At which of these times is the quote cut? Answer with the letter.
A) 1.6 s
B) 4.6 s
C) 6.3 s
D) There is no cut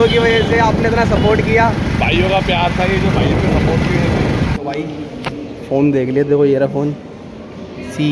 B